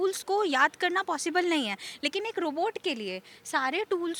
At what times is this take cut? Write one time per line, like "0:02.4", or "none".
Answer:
none

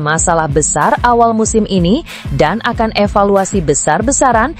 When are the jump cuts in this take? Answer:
none

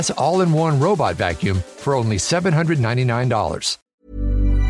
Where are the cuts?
0:03.8

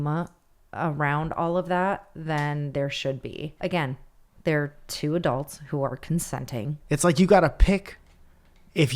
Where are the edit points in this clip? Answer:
0:03.5
0:06.8

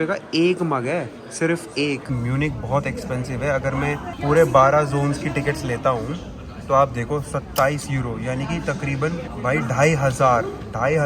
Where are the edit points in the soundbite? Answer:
0:02.1
0:04.1
0:09.3

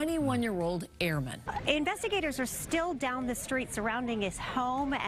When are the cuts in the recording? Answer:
0:01.5

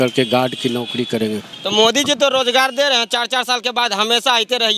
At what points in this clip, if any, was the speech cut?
0:01.5

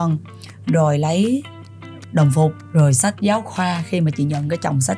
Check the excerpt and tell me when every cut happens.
0:02.6

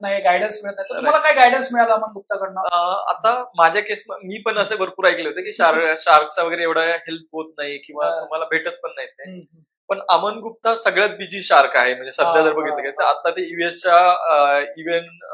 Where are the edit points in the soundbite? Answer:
none

